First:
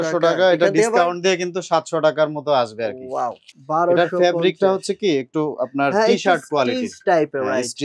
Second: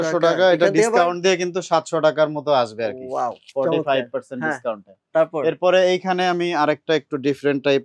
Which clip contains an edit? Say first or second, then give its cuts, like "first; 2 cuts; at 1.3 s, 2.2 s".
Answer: first; 1 cut; at 3.5 s